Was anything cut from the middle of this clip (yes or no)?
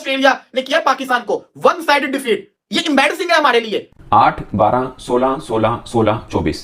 no